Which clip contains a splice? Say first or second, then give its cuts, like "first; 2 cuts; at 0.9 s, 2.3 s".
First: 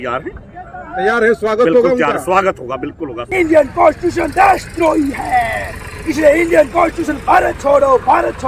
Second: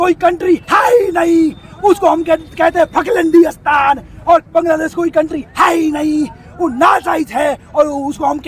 first; 1 cut; at 3.2 s